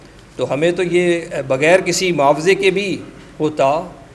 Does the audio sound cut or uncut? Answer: uncut